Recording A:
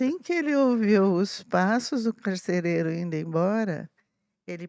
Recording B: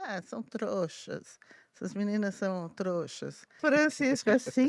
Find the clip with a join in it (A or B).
B